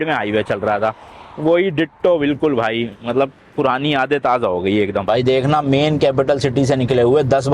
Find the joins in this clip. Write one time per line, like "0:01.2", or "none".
0:05.0